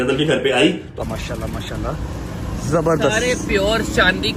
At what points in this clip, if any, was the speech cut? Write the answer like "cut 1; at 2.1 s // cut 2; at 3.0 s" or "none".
cut 1; at 1.0 s